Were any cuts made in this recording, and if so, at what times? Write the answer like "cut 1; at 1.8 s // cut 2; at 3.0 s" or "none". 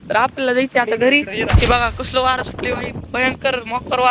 cut 1; at 1.5 s